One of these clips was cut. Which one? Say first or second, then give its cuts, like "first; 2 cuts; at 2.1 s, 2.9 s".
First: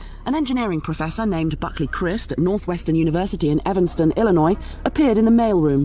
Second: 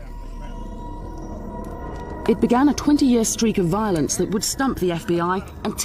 second; 1 cut; at 3.0 s